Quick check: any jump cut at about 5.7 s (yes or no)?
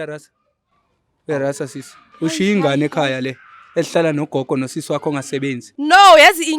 yes